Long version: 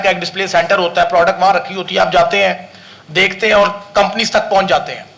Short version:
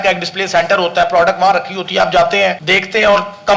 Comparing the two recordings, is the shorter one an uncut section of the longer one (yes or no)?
no